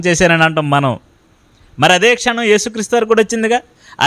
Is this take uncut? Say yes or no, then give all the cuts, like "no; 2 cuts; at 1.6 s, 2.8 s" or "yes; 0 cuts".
yes; 0 cuts